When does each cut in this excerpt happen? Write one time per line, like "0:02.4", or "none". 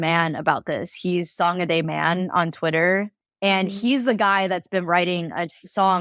0:03.1